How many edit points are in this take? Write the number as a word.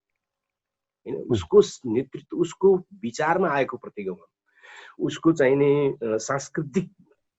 zero